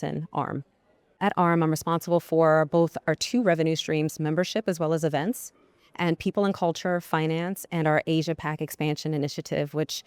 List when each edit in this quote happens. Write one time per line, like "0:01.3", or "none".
0:01.2